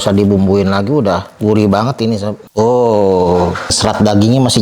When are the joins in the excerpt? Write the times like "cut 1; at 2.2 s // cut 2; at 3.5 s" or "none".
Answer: cut 1; at 1.3 s // cut 2; at 2.4 s // cut 3; at 3.8 s